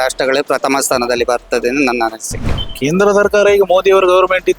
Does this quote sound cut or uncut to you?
cut